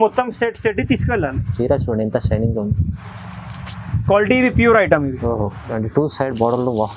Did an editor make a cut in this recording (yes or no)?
yes